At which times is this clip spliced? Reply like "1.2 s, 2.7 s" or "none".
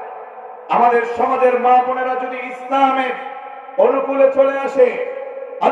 none